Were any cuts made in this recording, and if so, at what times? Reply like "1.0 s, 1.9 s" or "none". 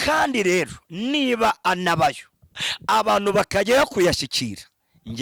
none